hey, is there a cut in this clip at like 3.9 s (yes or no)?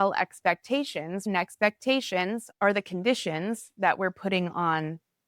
no